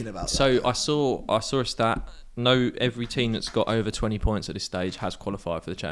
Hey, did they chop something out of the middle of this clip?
no; 0 cuts

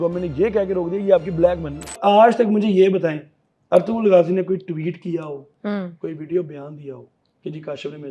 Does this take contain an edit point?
yes; 1 cut; at 2.0 s

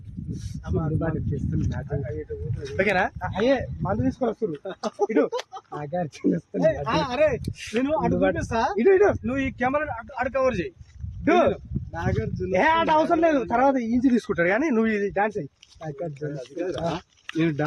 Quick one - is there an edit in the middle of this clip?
no; 0 cuts

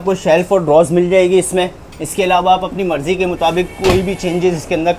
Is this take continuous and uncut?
yes; 0 cuts

